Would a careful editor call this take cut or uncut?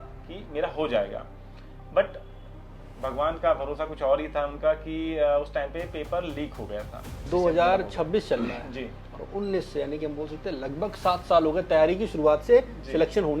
cut